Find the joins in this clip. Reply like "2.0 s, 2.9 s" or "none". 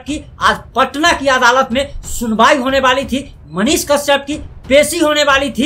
none

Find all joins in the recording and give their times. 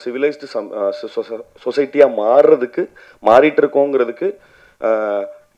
none

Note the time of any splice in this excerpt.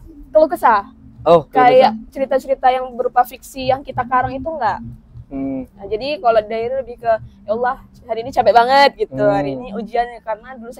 none

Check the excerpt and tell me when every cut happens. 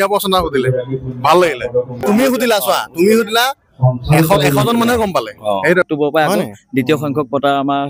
2.0 s, 5.9 s

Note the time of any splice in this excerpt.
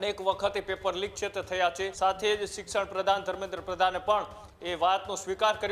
1.9 s

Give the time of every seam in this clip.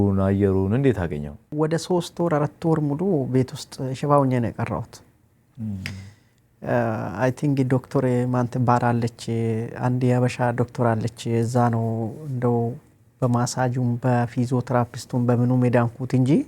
1.5 s

